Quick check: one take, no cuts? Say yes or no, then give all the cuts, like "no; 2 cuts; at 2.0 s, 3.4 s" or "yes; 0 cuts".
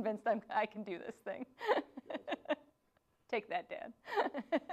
yes; 0 cuts